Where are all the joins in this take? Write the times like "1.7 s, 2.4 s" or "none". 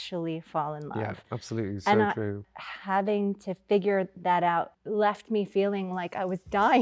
2.4 s, 4.8 s